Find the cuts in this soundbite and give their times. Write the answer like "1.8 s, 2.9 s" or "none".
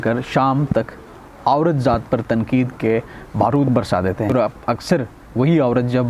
4.3 s

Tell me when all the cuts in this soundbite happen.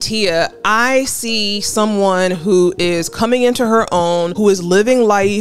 none

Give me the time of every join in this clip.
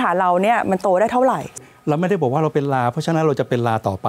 1.6 s

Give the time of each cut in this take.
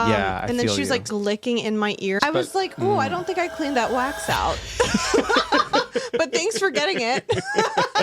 1.1 s, 2.2 s

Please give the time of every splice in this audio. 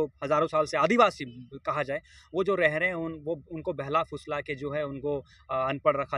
none

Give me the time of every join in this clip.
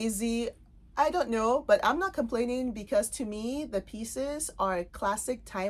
none

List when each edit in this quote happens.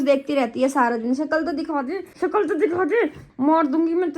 3.2 s

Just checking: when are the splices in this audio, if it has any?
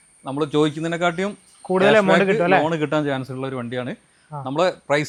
none

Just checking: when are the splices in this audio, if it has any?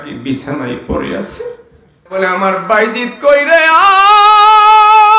2.1 s

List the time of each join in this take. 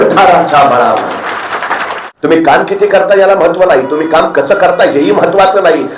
2.0 s

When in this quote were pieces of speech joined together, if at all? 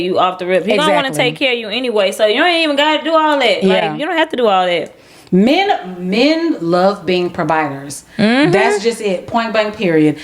none

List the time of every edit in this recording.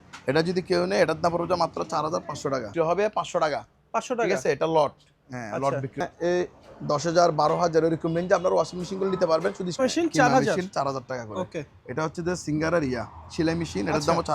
2.7 s, 6.0 s, 9.7 s

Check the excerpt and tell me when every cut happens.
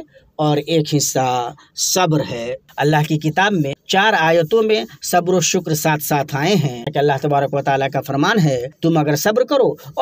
2.6 s, 3.8 s, 6.9 s, 8.7 s

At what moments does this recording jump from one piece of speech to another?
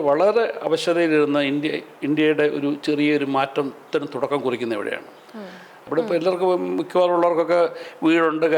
5.8 s

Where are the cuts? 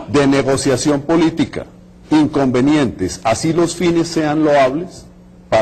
1.2 s

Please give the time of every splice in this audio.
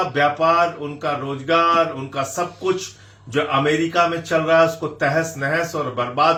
none

